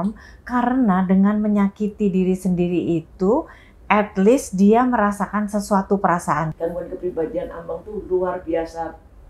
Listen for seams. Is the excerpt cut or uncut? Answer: cut